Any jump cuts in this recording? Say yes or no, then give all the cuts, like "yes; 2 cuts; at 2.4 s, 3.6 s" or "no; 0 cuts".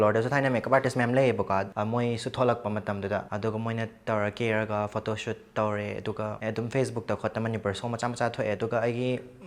yes; 3 cuts; at 1.7 s, 3.3 s, 6.4 s